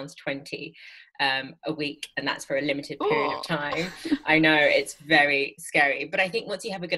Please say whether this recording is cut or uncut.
uncut